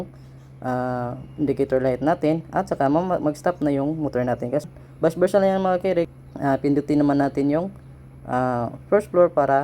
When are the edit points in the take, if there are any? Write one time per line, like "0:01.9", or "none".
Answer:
0:04.7
0:06.1